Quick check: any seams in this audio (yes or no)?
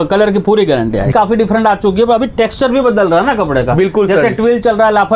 yes